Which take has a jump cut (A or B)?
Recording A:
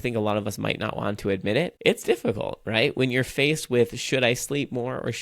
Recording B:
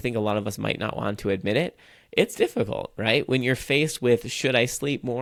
A